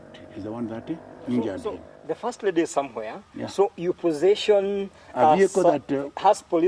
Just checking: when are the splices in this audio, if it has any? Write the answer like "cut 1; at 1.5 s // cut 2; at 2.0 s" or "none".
cut 1; at 1.9 s